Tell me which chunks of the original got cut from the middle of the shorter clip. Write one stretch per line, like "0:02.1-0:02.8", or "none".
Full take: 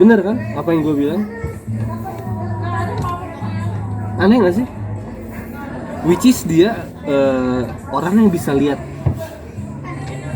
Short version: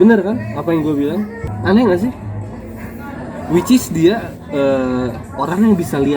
0:01.5-0:04.0